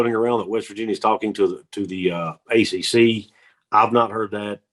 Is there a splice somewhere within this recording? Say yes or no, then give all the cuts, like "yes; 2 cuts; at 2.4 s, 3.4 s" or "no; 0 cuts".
no; 0 cuts